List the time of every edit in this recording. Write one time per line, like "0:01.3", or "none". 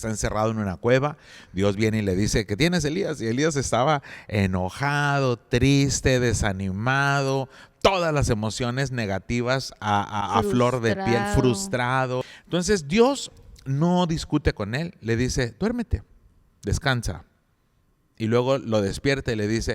0:12.4